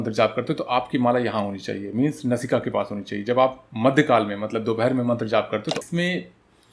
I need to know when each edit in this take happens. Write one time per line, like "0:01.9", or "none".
0:05.8